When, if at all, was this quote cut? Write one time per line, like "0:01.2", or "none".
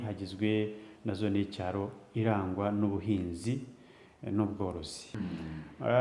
0:05.0

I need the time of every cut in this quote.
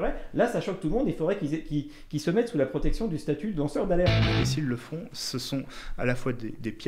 0:04.3

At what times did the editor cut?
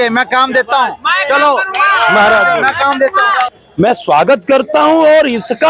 0:03.5

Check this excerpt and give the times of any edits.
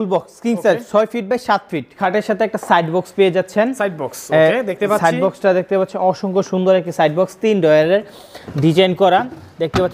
0:02.0

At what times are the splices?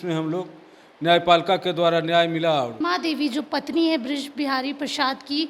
0:02.7

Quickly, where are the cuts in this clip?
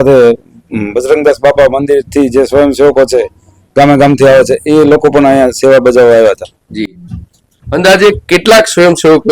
none

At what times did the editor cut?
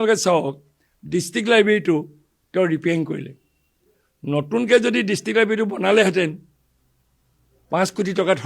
none

